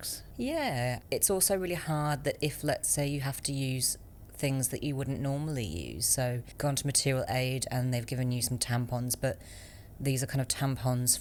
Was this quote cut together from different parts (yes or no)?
no